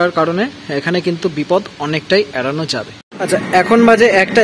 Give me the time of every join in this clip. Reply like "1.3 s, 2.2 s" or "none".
3.1 s